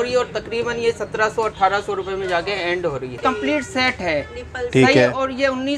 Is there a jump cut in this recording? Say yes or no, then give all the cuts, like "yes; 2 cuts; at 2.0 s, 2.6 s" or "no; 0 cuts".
yes; 1 cut; at 3.2 s